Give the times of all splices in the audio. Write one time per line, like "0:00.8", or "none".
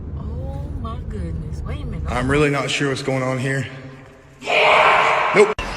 0:02.1